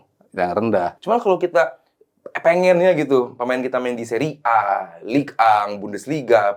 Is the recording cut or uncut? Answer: cut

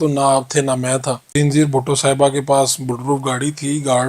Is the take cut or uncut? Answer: cut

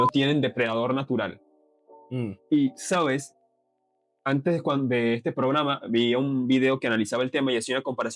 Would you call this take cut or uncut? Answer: uncut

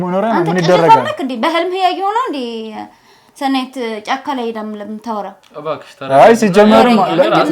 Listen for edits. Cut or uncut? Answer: uncut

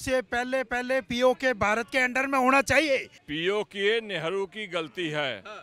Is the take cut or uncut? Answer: cut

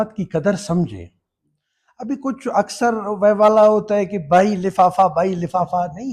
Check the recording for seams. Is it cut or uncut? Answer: uncut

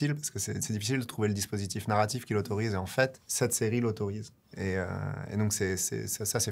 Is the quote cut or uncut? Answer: cut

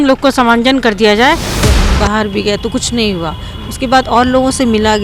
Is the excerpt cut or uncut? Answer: cut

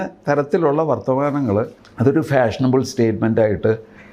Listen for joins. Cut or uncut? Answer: cut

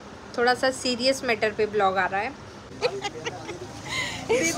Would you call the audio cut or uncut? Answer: cut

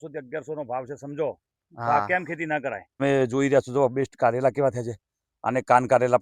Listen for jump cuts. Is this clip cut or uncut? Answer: cut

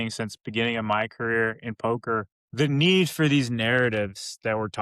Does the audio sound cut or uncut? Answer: cut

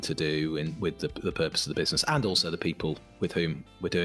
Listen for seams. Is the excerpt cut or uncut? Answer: uncut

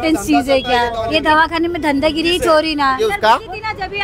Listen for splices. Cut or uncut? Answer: cut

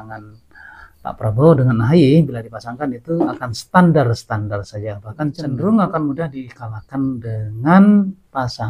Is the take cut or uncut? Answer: uncut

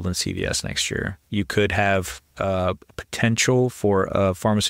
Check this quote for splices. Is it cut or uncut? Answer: cut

